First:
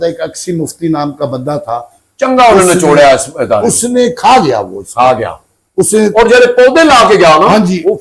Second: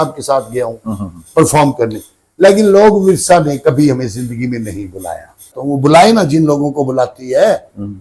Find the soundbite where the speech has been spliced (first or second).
second